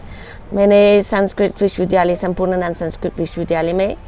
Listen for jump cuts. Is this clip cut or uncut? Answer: uncut